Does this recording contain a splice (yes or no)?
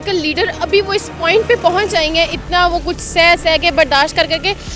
no